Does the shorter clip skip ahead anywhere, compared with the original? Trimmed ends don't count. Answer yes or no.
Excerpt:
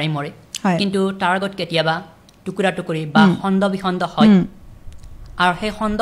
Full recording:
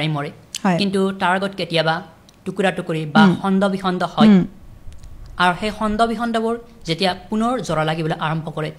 no